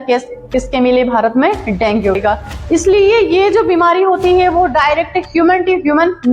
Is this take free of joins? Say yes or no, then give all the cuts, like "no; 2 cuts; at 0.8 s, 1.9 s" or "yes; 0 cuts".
no; 1 cut; at 2.2 s